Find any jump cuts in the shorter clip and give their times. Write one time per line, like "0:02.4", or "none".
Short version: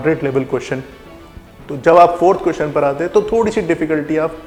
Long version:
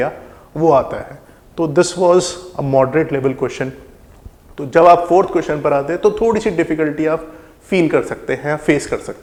none